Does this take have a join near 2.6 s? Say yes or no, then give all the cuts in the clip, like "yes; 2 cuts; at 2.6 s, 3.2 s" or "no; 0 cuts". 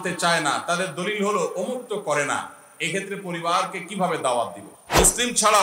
no; 1 cut; at 4.6 s